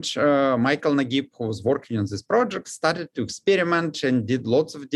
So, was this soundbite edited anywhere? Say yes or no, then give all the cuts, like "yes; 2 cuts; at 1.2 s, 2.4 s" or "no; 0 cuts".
no; 0 cuts